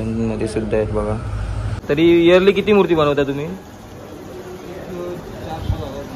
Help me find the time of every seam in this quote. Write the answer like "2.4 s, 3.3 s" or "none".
1.7 s